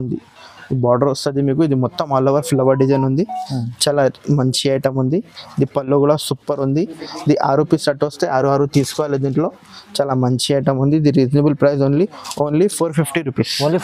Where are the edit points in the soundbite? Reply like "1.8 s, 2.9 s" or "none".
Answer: none